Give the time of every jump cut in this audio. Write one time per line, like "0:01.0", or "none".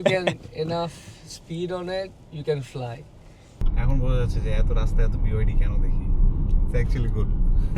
0:03.6